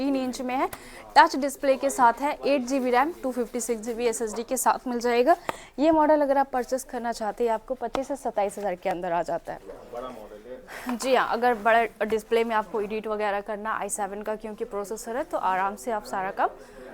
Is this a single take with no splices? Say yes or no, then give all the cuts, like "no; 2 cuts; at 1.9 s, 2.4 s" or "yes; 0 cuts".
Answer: yes; 0 cuts